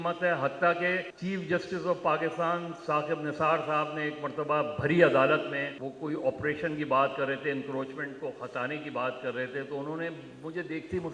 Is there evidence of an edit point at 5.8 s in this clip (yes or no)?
yes